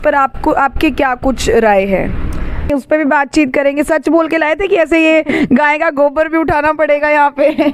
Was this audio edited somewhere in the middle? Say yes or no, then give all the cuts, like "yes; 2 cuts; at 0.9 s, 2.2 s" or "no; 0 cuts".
yes; 1 cut; at 2.7 s